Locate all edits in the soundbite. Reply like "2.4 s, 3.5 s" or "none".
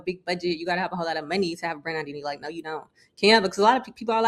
none